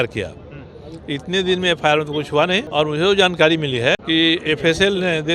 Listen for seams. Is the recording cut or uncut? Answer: cut